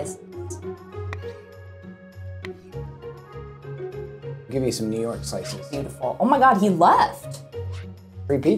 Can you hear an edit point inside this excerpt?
no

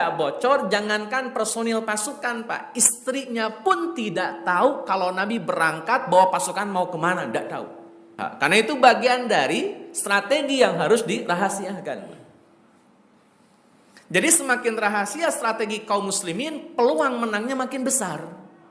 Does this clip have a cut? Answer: yes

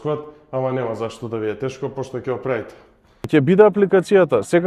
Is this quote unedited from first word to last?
no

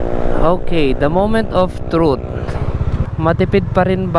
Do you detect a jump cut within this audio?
no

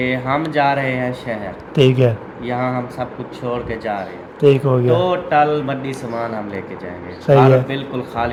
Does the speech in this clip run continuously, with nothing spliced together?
yes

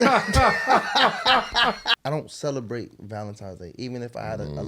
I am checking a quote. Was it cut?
yes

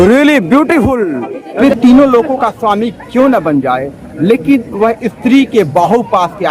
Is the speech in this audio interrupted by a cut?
yes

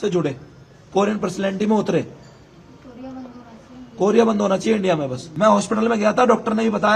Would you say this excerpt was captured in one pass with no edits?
no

